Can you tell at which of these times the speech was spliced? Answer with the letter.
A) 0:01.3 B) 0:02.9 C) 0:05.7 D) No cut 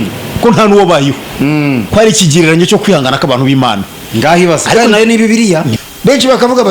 C